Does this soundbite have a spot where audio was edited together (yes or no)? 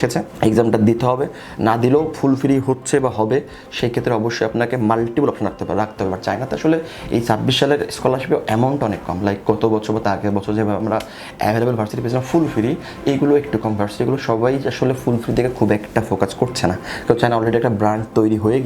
no